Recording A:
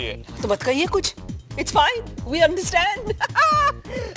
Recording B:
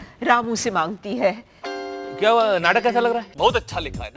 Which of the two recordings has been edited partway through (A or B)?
B